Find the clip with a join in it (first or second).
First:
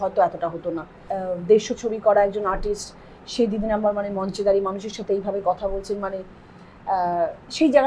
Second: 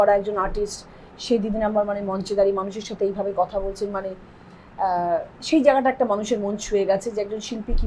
first